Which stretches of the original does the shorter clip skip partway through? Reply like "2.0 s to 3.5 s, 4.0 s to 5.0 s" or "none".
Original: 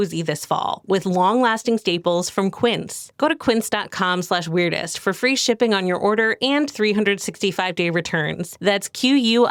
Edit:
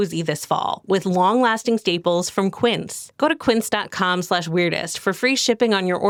none